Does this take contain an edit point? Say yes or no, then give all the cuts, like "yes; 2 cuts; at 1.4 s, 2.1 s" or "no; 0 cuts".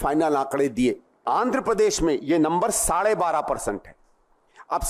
yes; 1 cut; at 1.2 s